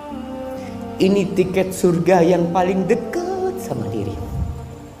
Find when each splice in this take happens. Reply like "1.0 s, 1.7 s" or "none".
0.9 s